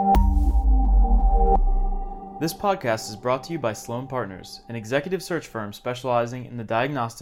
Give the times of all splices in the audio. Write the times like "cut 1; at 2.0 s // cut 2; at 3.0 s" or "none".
cut 1; at 2.3 s